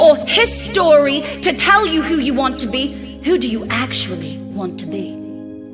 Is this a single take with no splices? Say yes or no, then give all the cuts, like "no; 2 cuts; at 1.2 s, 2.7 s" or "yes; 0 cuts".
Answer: no; 1 cut; at 4.4 s